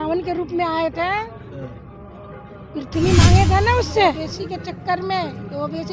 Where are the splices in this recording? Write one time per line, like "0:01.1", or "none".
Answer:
0:04.3